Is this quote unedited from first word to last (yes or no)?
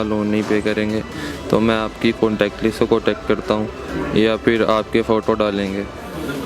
yes